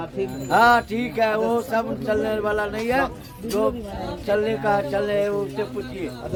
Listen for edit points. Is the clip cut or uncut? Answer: uncut